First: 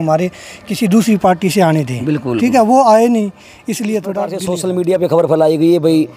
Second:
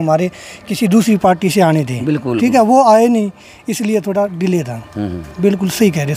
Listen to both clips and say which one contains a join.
first; 1 cut; at 4.5 s

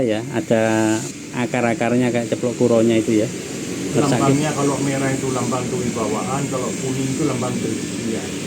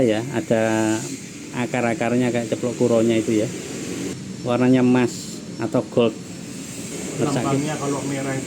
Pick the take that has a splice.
first; 2 cuts; at 1.2 s, 3.9 s

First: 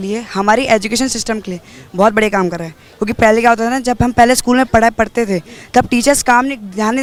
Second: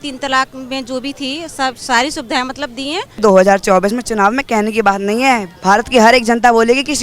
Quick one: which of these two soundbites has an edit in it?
second; 1 cut; at 3.2 s

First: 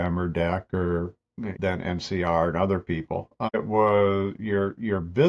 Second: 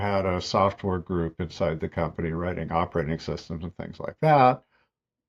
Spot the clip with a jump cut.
first; 1 cut; at 1.5 s

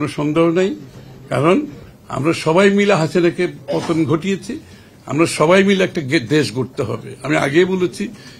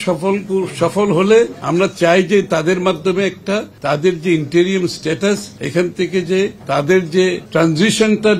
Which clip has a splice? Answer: second; 5 cuts; at 1.6 s, 3.7 s, 5.5 s, 6.6 s, 7.4 s

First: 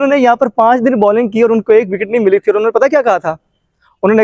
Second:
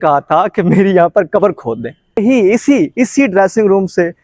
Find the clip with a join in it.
second; 1 cut; at 2.2 s

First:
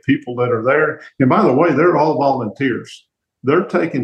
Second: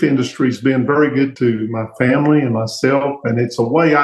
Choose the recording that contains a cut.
second; 1 cut; at 1.3 s

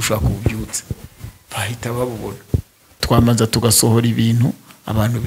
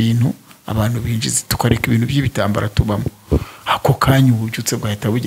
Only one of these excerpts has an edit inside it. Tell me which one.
first; 1 cut; at 3.0 s

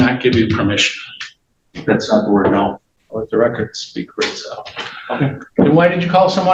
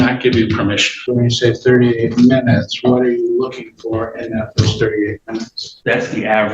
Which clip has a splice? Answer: second; 2 cuts; at 0.9 s, 5.6 s

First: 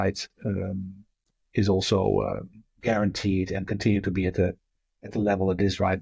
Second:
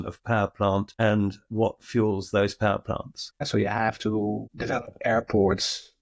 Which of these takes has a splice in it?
second; 1 cut; at 3.4 s

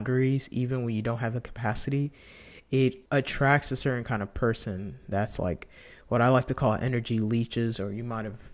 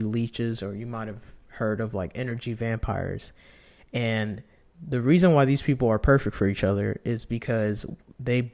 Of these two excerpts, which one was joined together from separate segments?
first; 1 cut; at 3.0 s

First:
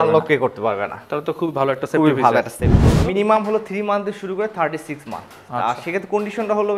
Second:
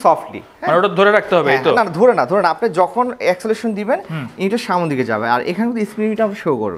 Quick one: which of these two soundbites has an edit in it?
first; 1 cut; at 2.8 s

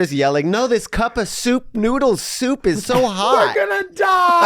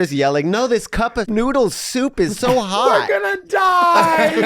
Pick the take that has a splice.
second; 1 cut; at 1.2 s

